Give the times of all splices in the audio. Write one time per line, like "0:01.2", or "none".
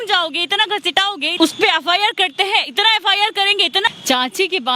0:01.3
0:03.9